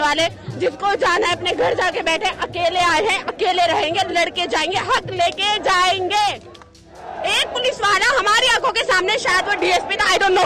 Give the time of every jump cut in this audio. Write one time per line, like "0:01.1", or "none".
0:06.8